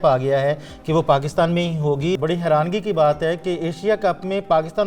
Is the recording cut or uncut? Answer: cut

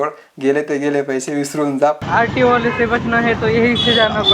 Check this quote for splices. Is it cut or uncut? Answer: cut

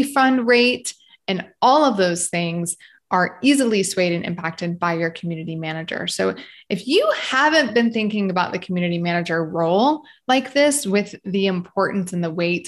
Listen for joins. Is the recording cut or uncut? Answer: uncut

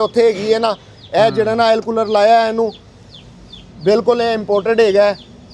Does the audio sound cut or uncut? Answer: uncut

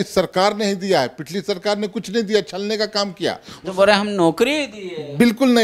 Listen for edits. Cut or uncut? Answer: uncut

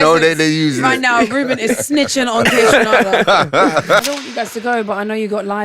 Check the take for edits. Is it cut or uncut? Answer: cut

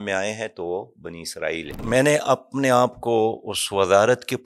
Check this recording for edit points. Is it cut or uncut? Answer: cut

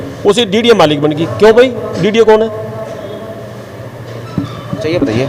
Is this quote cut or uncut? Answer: uncut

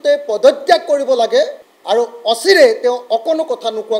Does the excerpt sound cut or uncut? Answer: cut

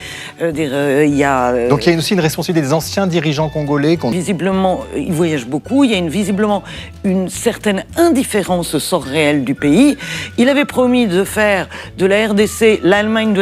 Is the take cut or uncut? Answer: cut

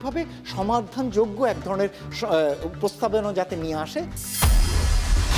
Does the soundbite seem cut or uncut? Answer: uncut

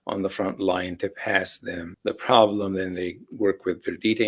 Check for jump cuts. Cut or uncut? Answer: cut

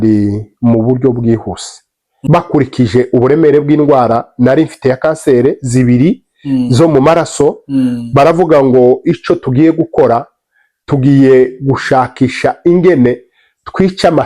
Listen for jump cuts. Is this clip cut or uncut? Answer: cut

